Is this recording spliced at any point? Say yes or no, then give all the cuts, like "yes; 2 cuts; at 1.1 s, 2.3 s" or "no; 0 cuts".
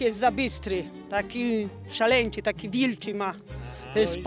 no; 0 cuts